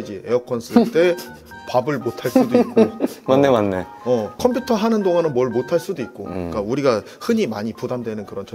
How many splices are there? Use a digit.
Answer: 1